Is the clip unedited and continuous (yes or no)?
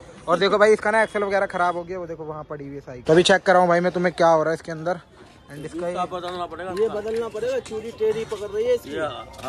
yes